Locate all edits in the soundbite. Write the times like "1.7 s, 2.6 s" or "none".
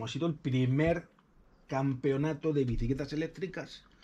none